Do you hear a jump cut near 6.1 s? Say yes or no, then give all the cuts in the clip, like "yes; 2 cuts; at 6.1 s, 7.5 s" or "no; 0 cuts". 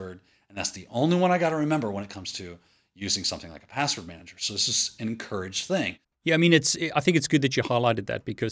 yes; 1 cut; at 6.1 s